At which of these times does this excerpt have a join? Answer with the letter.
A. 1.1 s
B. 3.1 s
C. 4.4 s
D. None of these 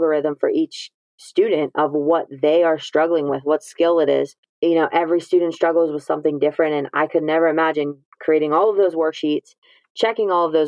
C